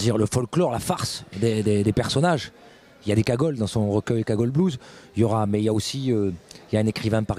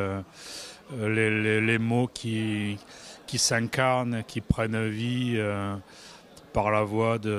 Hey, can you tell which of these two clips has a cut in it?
first; 1 cut; at 2.6 s

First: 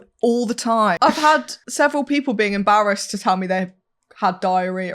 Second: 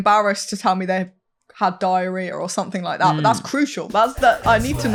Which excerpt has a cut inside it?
first; 2 cuts; at 1.0 s, 1.6 s

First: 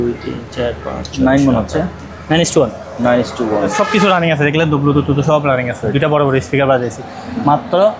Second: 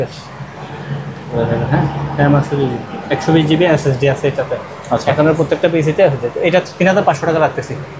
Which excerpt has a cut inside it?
first; 1 cut; at 3.7 s

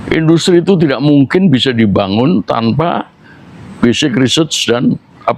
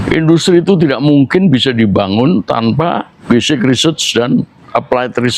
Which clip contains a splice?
second; 1 cut; at 3.1 s

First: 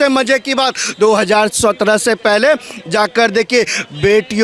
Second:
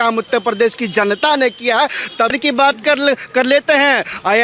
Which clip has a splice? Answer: second; 1 cut; at 2.3 s

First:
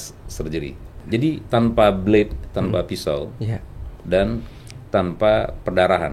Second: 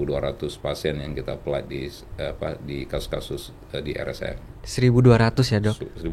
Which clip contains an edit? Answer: first; 1 cut; at 1.0 s

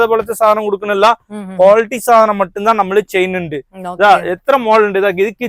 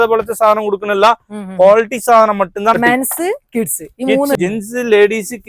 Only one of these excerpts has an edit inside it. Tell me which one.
second; 2 cuts; at 2.8 s, 4.4 s

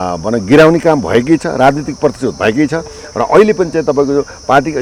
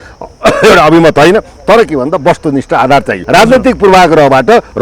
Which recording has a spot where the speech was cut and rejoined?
second; 1 cut; at 3.2 s

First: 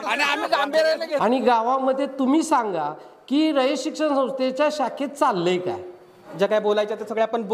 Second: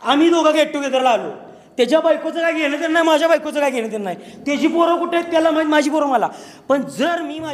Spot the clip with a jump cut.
first; 2 cuts; at 1.2 s, 6.2 s

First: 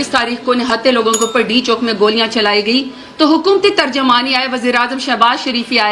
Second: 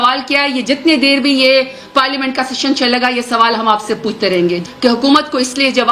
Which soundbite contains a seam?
second; 1 cut; at 4.6 s

